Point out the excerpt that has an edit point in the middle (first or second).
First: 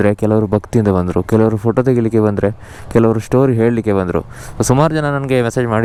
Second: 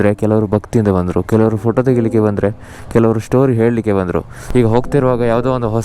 second